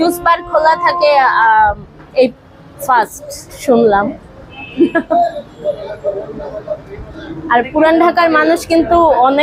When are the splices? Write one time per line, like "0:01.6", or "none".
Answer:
none